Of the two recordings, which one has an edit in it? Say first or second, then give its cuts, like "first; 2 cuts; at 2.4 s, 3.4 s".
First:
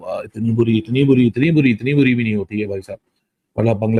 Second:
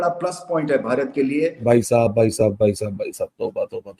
second; 1 cut; at 1.6 s